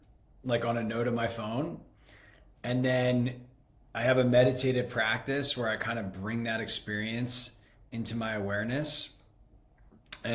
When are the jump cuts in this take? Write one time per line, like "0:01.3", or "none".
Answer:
none